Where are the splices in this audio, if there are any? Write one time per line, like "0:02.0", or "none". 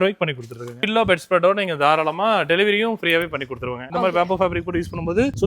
0:00.8
0:03.9

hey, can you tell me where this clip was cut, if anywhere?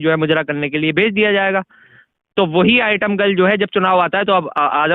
none

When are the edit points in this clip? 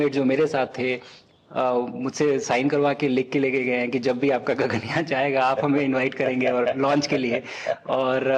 none

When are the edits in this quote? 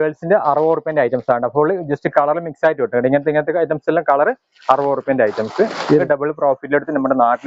0:06.0

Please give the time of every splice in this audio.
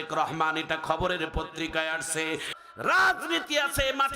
0:02.5

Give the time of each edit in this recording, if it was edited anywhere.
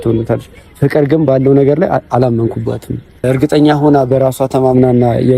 0:03.2

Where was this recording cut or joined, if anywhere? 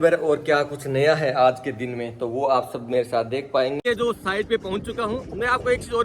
0:03.8

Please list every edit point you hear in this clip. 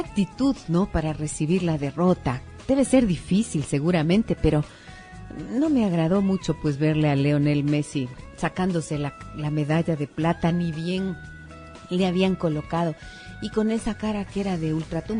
0:11.2

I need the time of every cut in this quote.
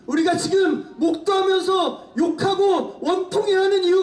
none

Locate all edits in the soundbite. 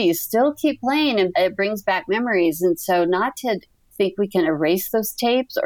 0:01.3
0:03.9

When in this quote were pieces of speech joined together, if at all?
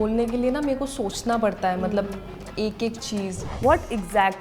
0:03.5

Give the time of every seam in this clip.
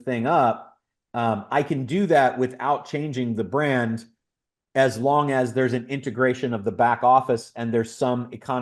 none

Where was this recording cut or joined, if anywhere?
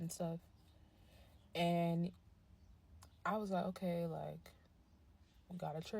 0:02.2

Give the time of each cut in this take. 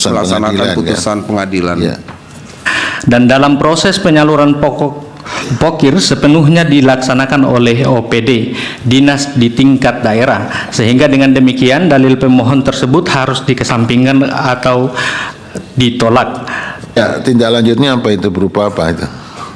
0:02.6
0:17.0

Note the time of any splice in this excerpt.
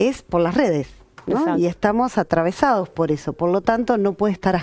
none

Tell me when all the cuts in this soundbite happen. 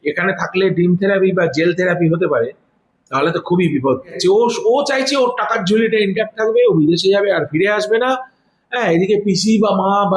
0:04.1

